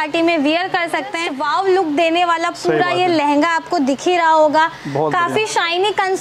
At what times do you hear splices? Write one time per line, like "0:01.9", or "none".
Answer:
0:01.3